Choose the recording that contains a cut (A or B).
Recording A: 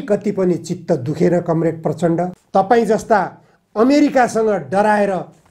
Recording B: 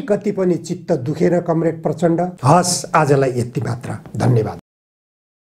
A